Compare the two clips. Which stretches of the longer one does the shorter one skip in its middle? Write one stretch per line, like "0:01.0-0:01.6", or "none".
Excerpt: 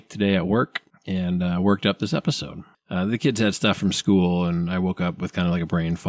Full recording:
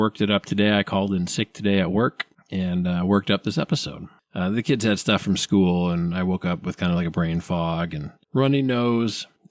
none